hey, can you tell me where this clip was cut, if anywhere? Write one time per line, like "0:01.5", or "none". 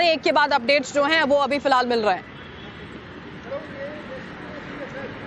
0:02.9

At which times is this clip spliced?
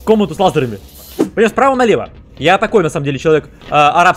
0:01.2

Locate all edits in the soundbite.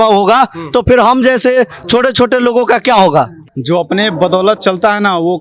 0:03.4

